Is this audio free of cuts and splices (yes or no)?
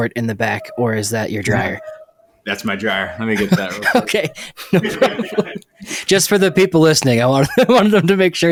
yes